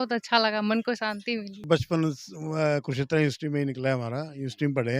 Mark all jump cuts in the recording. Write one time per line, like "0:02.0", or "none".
0:01.6

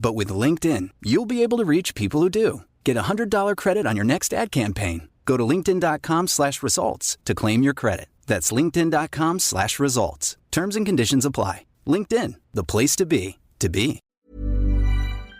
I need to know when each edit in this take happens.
0:14.2

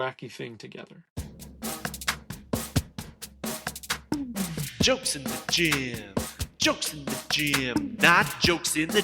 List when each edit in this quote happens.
0:01.0

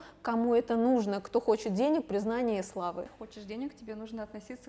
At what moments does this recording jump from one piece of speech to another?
0:03.2

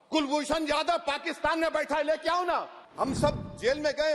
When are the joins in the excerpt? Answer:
0:02.8

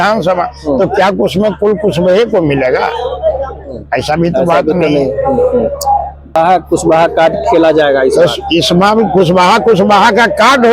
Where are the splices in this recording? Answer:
0:06.4

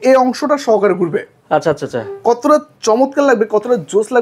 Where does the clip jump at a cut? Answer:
none

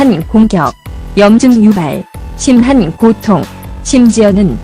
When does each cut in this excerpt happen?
none

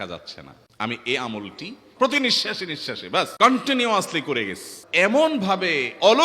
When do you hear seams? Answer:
0:01.8
0:03.3
0:04.8

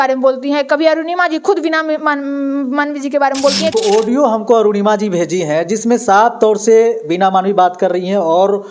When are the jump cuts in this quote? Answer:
0:03.7

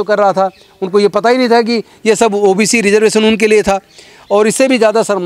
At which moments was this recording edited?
none

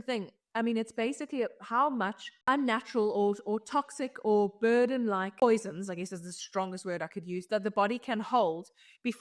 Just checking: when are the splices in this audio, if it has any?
0:02.4
0:05.4

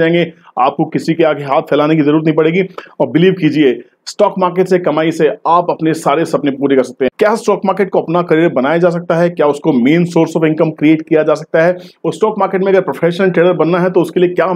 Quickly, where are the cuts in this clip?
0:07.1

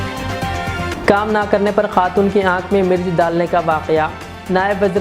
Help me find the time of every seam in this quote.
0:00.9

